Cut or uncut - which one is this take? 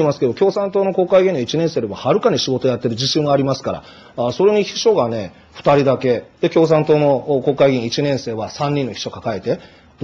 uncut